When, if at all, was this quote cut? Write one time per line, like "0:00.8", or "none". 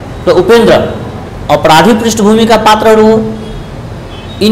none

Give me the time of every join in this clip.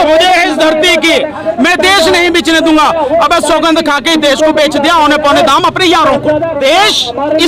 0:06.6

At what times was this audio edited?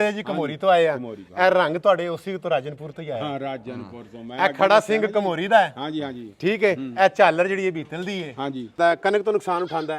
0:08.8

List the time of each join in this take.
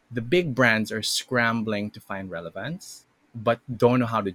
0:02.8

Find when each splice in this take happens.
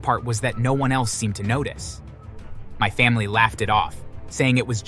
none

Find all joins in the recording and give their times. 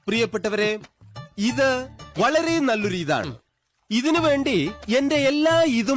none

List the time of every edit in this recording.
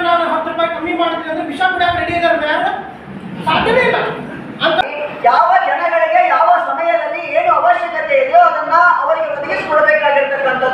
0:04.8

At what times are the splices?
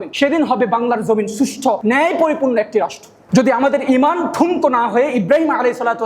0:03.1

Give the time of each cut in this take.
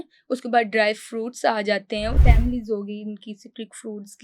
0:02.2

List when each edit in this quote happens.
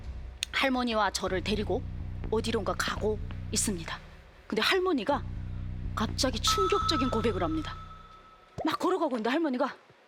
none

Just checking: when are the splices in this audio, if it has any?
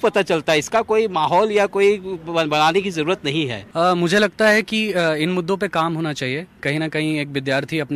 0:03.6

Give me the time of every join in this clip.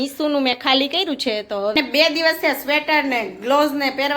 0:01.8

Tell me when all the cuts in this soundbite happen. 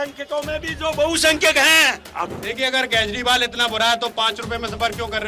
0:02.1

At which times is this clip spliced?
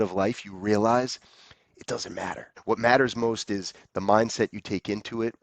0:02.5

